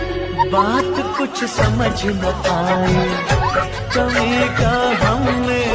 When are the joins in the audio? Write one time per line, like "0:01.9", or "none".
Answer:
none